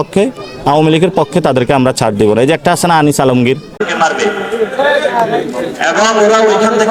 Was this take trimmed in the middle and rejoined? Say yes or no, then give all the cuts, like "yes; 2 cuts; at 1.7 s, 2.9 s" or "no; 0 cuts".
no; 0 cuts